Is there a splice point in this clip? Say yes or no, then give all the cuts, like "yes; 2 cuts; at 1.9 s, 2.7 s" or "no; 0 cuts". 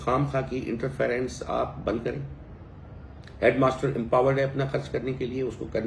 no; 0 cuts